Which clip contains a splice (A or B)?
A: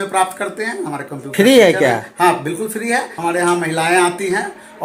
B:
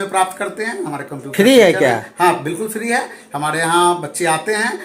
A